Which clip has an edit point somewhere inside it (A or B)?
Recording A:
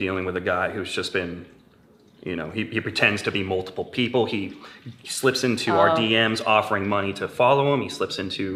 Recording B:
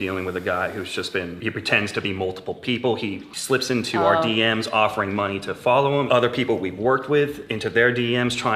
B